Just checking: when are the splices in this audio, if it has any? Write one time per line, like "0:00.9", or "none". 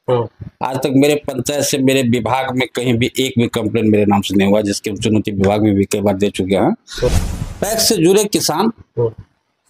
0:07.1